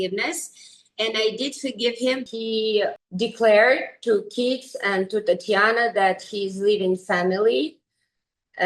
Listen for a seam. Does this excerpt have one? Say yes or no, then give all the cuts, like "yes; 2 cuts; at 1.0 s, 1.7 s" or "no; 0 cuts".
yes; 2 cuts; at 2.2 s, 3.0 s